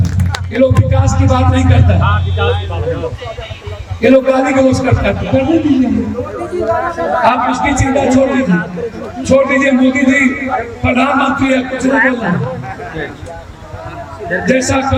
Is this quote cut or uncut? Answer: uncut